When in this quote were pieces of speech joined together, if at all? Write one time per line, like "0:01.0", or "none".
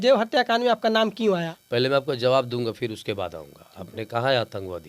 0:01.5